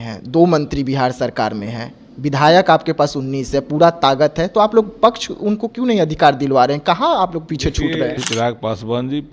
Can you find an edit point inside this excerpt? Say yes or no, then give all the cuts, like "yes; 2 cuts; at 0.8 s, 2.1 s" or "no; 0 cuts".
yes; 1 cut; at 8.2 s